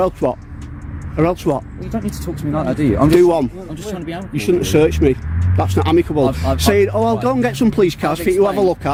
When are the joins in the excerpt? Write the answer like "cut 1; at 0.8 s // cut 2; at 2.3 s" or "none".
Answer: none